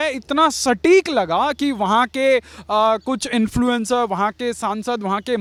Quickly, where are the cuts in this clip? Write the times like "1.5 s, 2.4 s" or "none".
none